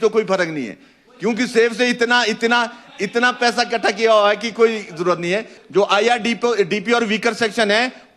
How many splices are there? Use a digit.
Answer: 1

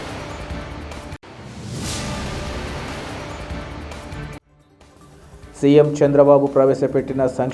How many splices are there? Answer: 1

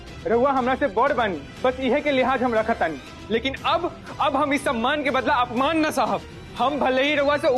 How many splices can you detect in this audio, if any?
3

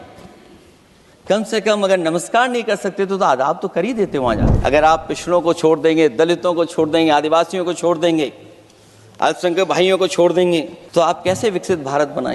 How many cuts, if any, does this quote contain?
2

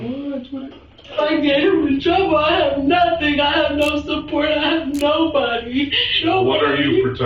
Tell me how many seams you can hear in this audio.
2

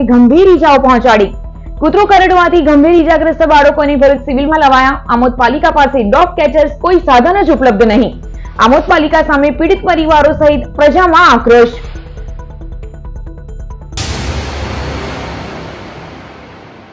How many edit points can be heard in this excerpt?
1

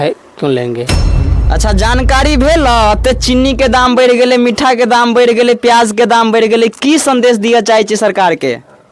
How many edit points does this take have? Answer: 1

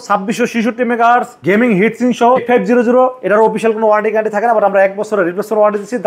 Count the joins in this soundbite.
2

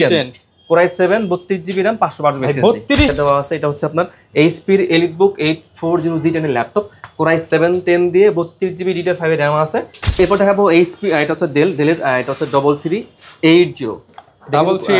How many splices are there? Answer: 2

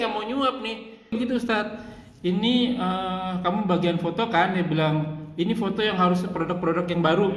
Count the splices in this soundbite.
1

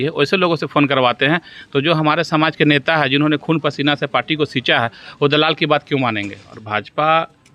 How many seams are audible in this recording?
1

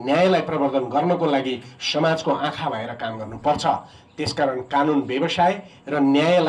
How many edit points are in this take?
0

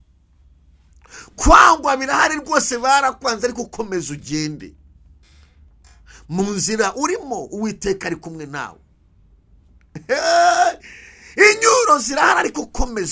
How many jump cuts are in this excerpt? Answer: 0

